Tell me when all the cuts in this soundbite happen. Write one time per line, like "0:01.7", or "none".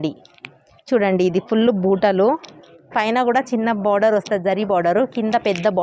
none